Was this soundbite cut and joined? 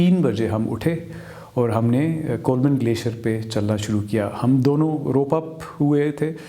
no; 0 cuts

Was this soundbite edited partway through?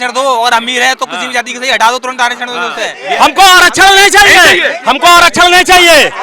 yes; 1 cut; at 3.0 s

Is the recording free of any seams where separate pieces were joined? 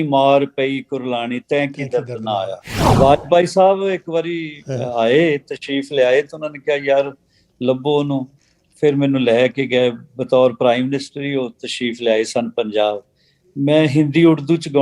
no; 1 cut; at 2.8 s

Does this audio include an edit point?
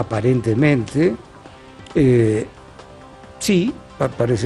yes; 1 cut; at 1.1 s

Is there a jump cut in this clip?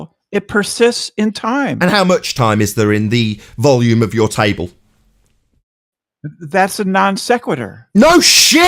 no; 0 cuts

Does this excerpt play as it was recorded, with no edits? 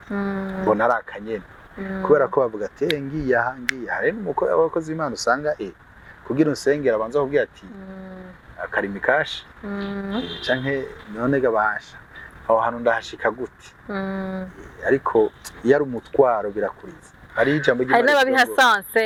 yes; 0 cuts

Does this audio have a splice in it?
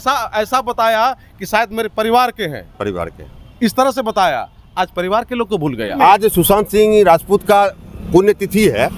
yes; 1 cut; at 6.0 s

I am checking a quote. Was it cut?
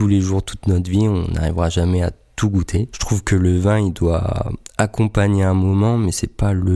yes; 1 cut; at 3.0 s

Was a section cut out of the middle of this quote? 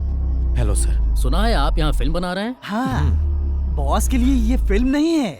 no; 0 cuts

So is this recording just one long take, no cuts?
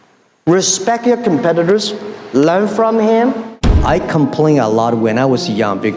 no; 1 cut; at 3.7 s

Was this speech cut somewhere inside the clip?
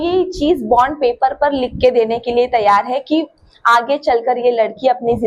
no; 0 cuts

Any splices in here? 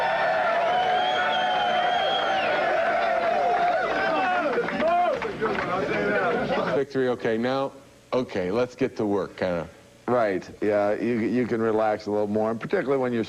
no; 0 cuts

